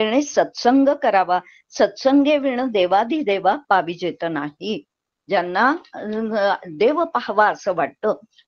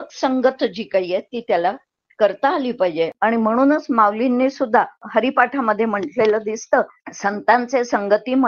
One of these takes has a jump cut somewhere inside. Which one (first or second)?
second